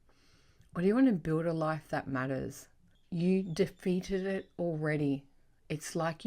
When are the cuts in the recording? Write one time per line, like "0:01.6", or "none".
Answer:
0:03.0

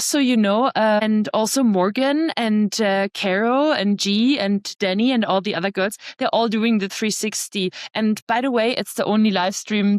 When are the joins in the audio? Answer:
0:01.0

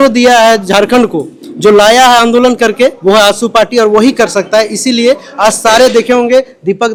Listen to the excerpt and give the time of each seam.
none

